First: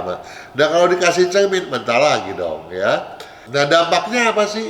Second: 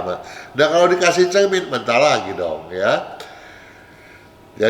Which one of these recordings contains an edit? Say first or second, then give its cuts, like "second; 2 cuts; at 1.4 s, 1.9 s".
first; 1 cut; at 3.4 s